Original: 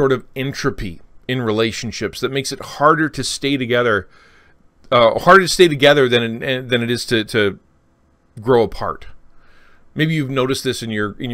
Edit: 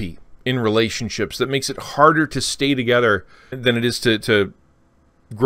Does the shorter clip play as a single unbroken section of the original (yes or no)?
no